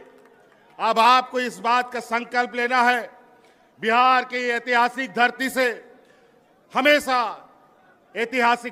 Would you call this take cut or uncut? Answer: uncut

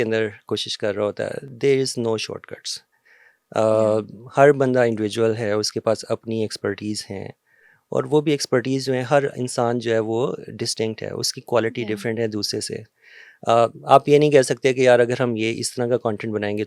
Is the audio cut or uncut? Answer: uncut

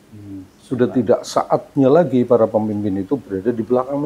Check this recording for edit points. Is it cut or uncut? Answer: uncut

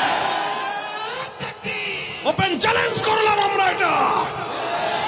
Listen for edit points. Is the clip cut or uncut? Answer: cut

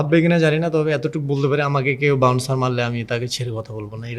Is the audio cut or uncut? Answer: uncut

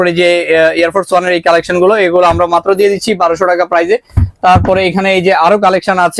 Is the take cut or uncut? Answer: uncut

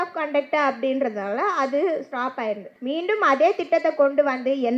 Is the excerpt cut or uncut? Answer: cut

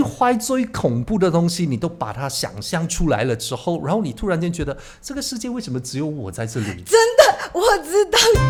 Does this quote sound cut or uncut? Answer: uncut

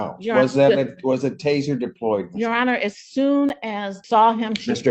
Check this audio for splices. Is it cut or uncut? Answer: cut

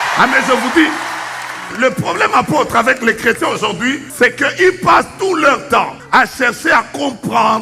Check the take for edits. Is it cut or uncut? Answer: cut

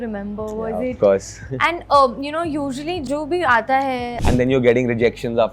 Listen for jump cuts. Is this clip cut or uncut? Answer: cut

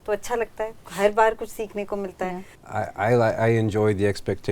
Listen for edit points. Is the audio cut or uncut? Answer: cut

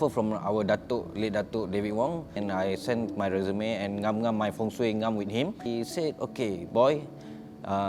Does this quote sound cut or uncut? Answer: cut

